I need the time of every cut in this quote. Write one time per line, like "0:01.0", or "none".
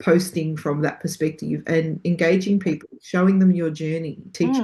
none

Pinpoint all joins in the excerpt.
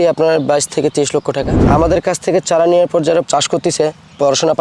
0:01.6
0:03.3

